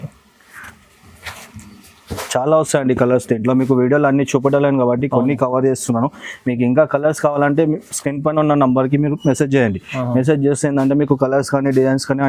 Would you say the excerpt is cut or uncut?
uncut